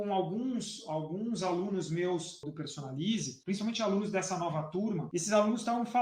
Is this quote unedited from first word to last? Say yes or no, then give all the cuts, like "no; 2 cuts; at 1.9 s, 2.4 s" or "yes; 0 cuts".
no; 3 cuts; at 2.4 s, 3.3 s, 5.0 s